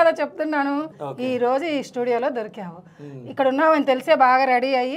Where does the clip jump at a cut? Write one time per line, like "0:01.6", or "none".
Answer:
0:00.9